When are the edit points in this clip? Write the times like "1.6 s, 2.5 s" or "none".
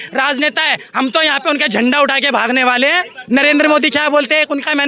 3.1 s